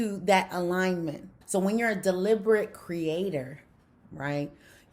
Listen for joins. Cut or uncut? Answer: cut